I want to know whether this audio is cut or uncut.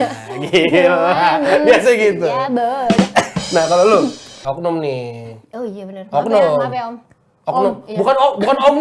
cut